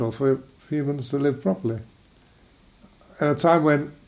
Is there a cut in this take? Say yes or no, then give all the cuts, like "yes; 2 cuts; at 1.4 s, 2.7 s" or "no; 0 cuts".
no; 0 cuts